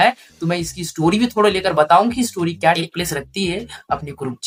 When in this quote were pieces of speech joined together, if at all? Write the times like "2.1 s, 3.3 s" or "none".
none